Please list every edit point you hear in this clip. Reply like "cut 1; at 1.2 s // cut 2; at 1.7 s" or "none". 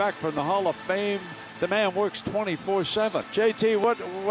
cut 1; at 3.2 s